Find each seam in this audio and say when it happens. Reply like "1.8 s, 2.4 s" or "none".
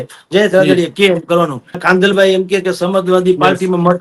1.8 s